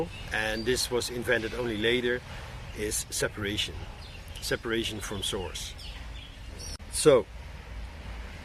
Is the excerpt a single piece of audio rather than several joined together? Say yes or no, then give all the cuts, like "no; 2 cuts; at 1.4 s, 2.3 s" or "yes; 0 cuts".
no; 1 cut; at 6.8 s